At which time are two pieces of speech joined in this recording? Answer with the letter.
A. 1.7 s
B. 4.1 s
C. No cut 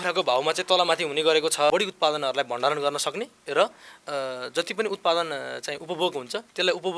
A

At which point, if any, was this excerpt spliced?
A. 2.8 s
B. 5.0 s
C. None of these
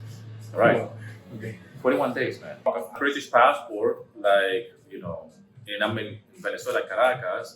A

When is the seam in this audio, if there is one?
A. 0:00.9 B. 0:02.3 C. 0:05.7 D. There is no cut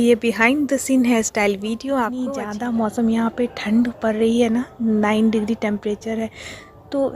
B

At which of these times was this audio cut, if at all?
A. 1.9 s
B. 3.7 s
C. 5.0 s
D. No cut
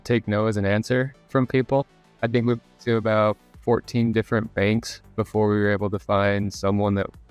A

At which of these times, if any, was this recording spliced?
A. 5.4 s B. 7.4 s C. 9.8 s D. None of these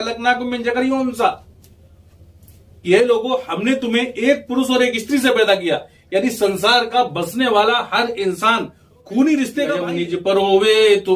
C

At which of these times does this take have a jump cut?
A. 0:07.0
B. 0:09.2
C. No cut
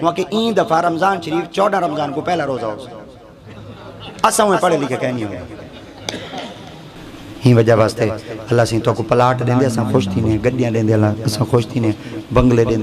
A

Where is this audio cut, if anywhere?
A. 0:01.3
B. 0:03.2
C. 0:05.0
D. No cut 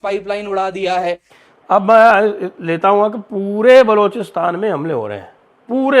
A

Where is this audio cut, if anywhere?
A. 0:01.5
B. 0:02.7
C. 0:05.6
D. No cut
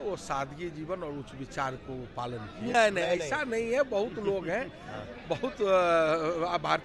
B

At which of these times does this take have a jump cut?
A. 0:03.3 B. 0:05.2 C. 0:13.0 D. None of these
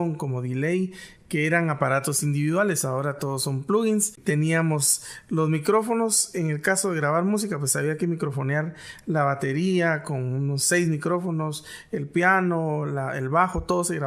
D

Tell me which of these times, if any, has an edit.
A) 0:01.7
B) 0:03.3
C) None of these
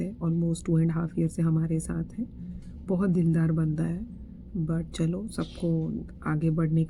C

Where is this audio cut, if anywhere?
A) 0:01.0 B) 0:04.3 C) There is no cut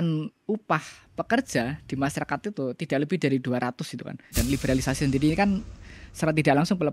B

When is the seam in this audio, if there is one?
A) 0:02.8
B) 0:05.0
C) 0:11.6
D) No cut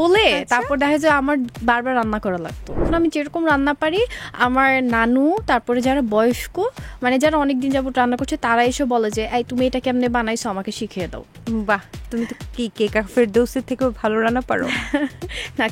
A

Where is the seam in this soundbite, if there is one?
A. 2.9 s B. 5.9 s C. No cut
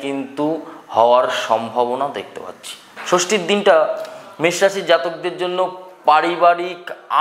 A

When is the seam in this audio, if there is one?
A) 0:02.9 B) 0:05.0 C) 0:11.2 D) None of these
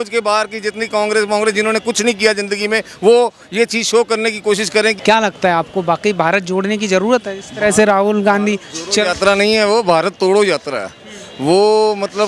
B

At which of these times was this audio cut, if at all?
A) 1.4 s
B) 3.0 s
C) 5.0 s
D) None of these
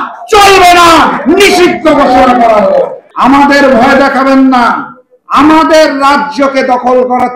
B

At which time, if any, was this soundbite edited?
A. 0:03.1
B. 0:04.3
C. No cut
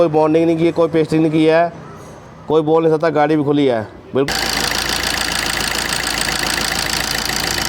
B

